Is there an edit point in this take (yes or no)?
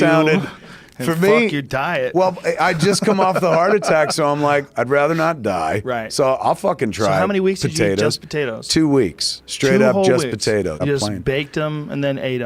yes